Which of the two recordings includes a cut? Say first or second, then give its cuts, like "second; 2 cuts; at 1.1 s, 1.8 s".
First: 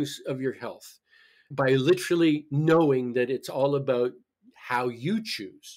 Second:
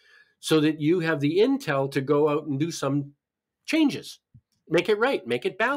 second; 1 cut; at 4.5 s